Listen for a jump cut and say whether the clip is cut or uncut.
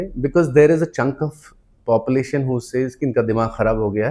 uncut